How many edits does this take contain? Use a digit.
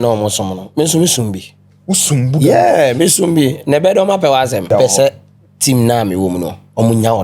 1